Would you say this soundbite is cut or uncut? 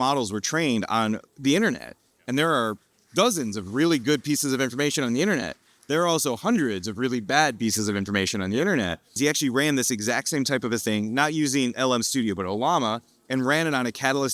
cut